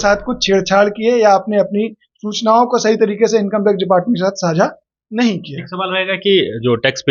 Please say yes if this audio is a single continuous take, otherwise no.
yes